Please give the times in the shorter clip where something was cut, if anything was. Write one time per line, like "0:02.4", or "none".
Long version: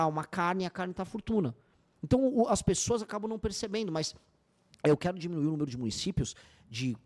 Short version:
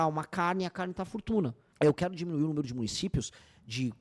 0:01.6